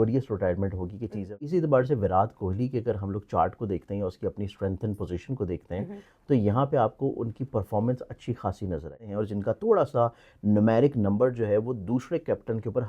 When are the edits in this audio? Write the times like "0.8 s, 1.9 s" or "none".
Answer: 1.5 s, 9.0 s